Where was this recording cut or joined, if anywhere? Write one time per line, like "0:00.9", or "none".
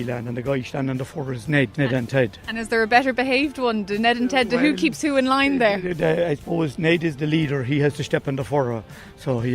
0:01.7